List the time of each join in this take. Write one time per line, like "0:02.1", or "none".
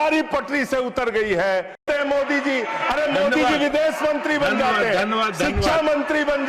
0:01.8